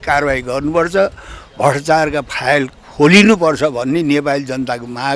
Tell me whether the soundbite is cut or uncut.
uncut